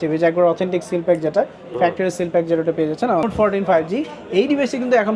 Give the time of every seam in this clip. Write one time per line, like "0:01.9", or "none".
0:03.2